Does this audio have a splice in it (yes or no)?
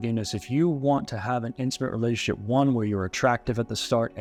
no